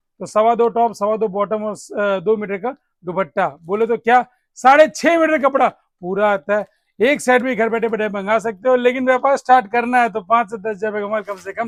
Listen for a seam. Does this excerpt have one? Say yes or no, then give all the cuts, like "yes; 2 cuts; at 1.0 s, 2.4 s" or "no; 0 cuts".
no; 0 cuts